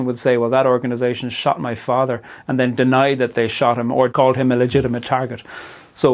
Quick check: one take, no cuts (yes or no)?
no